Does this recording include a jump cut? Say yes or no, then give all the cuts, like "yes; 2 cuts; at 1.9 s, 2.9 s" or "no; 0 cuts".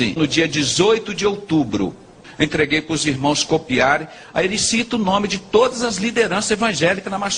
yes; 1 cut; at 2.2 s